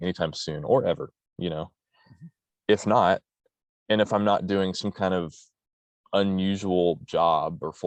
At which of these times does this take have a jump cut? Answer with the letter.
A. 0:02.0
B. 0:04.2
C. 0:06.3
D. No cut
D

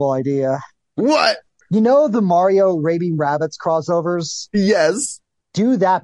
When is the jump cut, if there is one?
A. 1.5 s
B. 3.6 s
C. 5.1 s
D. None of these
A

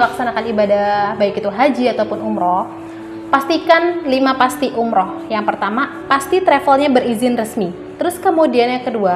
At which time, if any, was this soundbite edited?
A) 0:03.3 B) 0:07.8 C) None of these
B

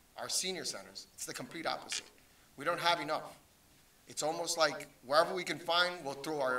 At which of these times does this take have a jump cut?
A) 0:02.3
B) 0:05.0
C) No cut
C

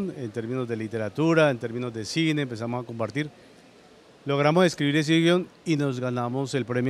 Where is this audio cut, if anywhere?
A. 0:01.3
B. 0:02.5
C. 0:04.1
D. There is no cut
D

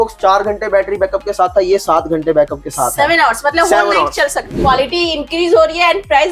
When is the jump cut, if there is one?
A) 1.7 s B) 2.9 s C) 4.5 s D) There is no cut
C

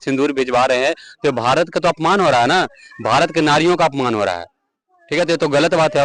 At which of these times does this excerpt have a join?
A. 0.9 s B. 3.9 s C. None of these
C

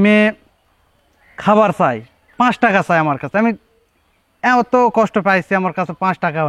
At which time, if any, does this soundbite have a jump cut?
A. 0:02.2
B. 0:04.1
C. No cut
C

